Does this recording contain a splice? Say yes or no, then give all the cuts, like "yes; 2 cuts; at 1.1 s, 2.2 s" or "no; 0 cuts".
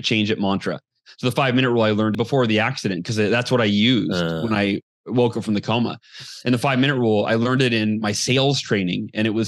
yes; 1 cut; at 2.1 s